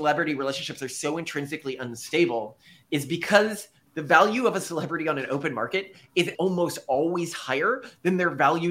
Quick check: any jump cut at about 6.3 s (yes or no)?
yes